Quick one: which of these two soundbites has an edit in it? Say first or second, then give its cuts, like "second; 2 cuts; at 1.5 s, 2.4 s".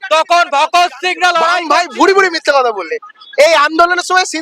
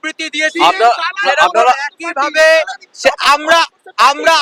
first; 1 cut; at 1.6 s